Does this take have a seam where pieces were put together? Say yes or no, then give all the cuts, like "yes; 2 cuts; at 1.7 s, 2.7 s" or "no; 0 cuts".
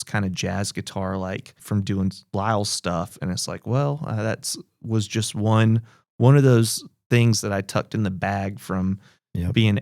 yes; 1 cut; at 1.5 s